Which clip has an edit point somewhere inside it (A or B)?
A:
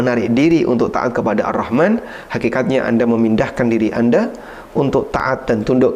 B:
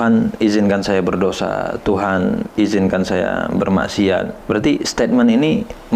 B